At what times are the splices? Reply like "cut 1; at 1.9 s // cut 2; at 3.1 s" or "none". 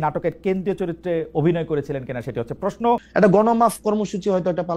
cut 1; at 3.1 s

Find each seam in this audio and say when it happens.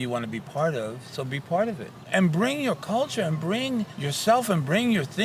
cut 1; at 2.0 s // cut 2; at 4.0 s

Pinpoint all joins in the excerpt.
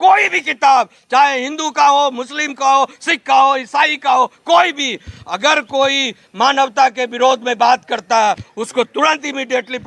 none

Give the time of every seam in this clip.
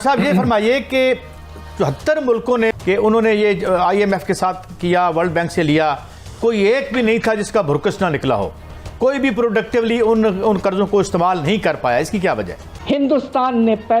cut 1; at 2.7 s // cut 2; at 12.8 s

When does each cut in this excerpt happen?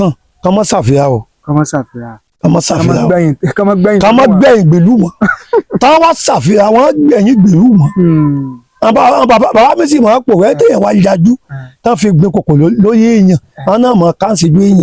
none

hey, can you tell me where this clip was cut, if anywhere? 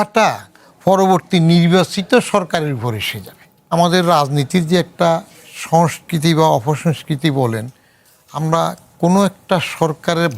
cut 1; at 3.7 s

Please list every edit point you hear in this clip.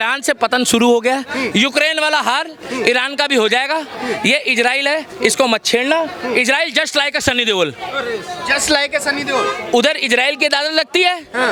none

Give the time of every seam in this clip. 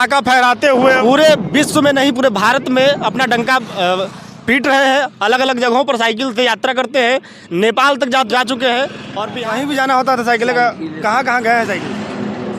cut 1; at 8.3 s // cut 2; at 9.2 s

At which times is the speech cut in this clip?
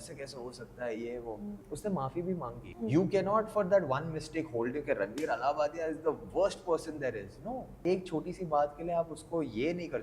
cut 1; at 1.7 s // cut 2; at 2.6 s // cut 3; at 7.8 s

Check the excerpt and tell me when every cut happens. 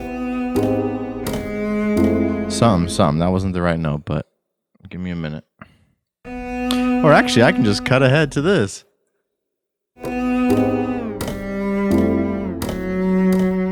cut 1; at 1.2 s // cut 2; at 10.0 s

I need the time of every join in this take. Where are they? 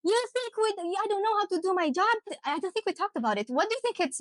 cut 1; at 2.4 s

